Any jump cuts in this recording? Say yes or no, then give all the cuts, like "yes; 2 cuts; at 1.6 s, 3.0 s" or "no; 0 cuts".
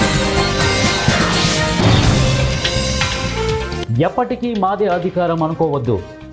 yes; 1 cut; at 3.9 s